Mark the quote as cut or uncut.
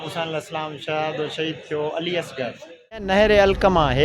cut